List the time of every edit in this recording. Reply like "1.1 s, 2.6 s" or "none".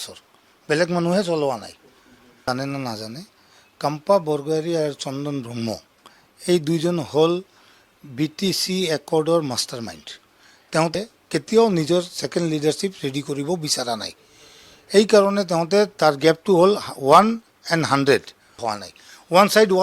2.4 s, 10.9 s, 18.7 s